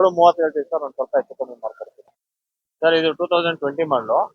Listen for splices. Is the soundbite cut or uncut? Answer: cut